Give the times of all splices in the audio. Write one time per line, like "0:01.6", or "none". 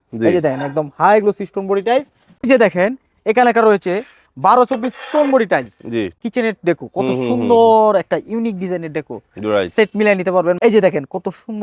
0:02.2
0:06.2
0:10.6